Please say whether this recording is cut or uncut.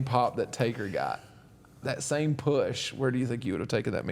uncut